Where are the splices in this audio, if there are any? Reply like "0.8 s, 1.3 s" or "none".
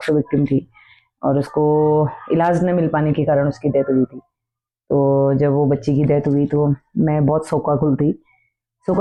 none